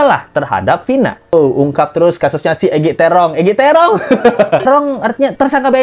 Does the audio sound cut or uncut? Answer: cut